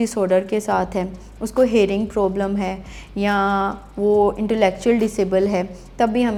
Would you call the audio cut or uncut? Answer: uncut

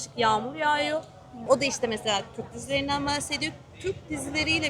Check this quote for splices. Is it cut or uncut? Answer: cut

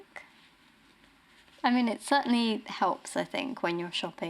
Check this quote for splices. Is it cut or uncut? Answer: cut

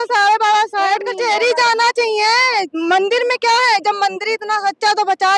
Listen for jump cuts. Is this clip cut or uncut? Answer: cut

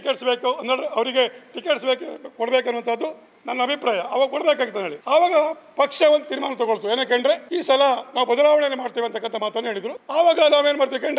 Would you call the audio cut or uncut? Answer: cut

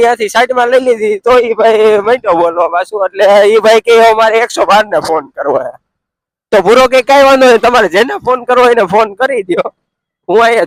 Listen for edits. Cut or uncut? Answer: uncut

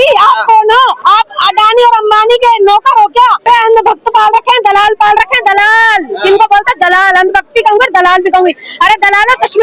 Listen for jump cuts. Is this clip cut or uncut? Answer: cut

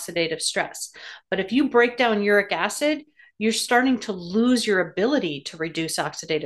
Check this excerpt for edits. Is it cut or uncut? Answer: uncut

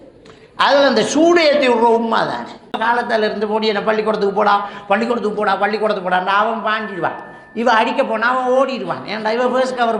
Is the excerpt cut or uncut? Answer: cut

